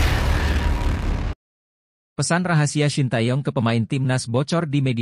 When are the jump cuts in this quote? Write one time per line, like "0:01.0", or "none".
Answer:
none